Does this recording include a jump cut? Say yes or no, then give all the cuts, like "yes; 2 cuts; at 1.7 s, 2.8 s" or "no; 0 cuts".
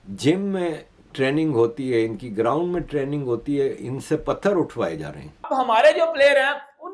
yes; 1 cut; at 5.3 s